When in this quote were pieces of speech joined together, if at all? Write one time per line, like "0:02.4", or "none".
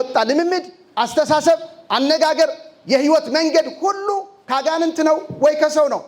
none